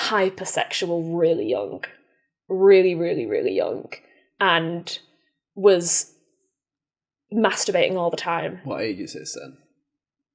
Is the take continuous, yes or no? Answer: yes